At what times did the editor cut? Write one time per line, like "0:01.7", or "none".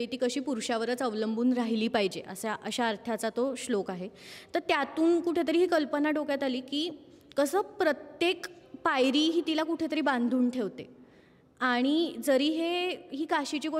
none